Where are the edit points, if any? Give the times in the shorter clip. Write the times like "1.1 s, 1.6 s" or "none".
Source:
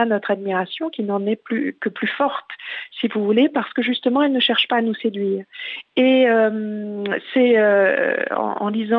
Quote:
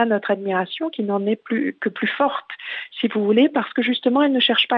none